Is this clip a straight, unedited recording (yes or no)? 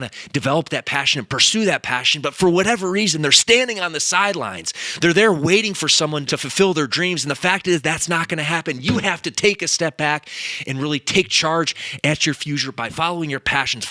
no